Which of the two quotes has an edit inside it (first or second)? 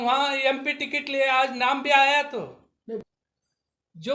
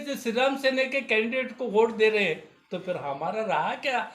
first